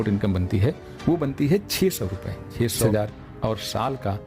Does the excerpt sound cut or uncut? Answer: cut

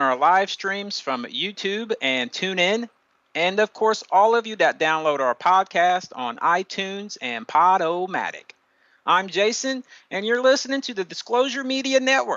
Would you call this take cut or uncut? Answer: uncut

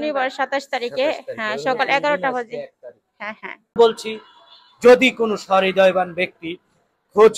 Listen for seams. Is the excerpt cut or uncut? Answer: cut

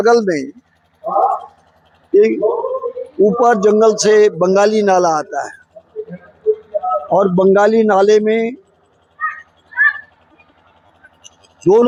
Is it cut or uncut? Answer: uncut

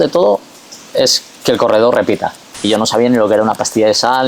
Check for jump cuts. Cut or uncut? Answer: cut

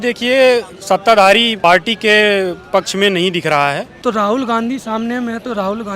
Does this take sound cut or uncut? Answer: cut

